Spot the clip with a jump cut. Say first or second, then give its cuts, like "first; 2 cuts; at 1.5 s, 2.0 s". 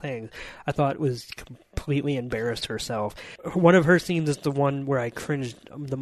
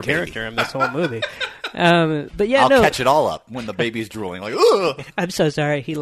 first; 1 cut; at 3.3 s